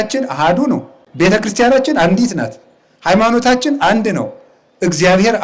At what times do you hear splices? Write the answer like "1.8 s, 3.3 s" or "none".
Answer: 1.0 s